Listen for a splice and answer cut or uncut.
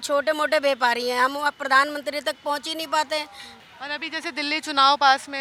uncut